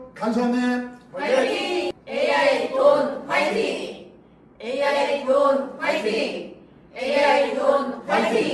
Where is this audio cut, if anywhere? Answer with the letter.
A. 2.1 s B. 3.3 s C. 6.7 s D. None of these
D